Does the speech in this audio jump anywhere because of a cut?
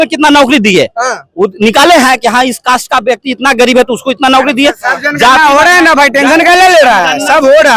no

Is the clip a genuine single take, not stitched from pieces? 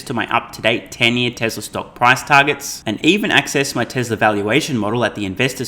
yes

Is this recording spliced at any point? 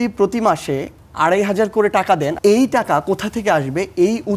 yes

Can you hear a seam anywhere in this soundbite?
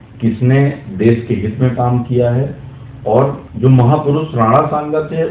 yes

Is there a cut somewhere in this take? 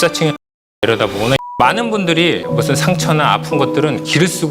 yes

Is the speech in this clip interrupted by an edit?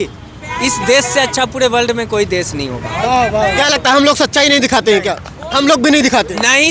no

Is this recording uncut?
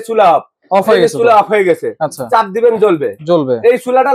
yes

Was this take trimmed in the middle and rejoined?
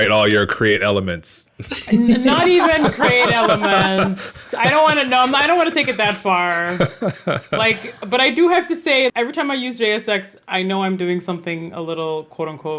yes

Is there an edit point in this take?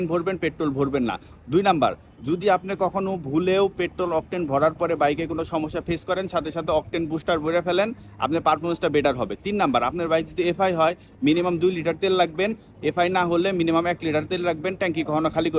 no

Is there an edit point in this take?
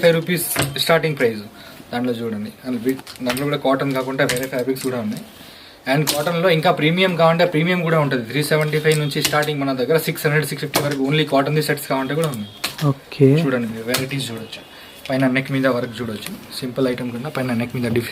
no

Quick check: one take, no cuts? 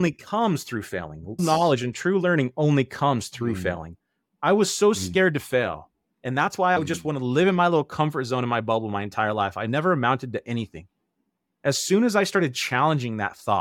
no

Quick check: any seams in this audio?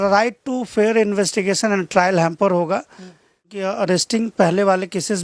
yes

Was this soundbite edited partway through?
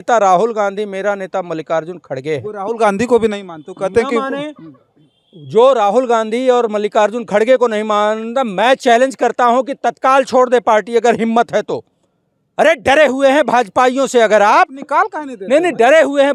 no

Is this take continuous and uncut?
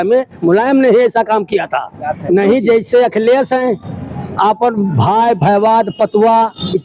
no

